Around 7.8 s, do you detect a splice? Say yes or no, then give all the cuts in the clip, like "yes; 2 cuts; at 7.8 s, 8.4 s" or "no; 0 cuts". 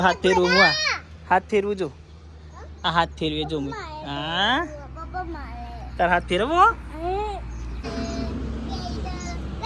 yes; 1 cut; at 7.8 s